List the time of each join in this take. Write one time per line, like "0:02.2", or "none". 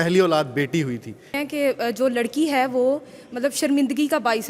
0:01.3